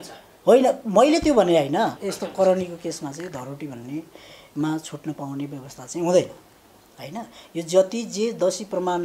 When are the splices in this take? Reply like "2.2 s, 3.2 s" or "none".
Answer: 2.0 s